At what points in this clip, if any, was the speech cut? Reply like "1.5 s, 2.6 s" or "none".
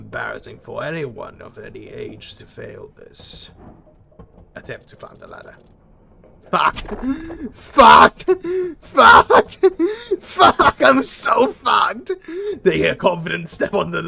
none